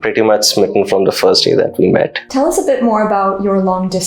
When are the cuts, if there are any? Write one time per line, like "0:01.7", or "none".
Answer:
0:02.2